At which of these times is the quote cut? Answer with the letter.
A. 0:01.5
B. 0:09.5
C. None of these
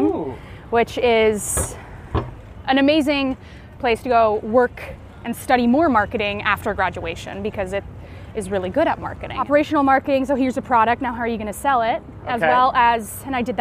B